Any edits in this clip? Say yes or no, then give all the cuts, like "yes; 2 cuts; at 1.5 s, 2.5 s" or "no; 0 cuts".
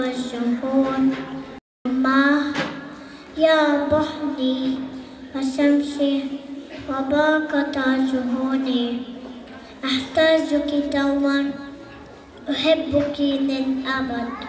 no; 0 cuts